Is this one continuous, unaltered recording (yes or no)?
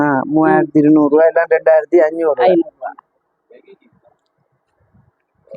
yes